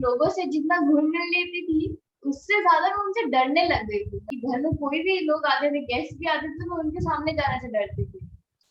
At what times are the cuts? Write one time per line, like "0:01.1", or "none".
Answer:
0:04.3